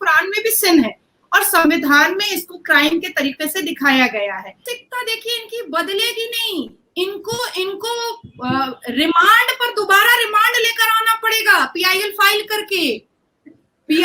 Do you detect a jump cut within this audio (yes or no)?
yes